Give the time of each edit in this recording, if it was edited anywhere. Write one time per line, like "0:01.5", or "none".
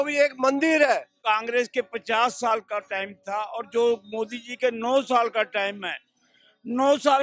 0:01.2